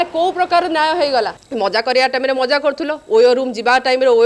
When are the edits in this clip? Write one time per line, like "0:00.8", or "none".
0:01.3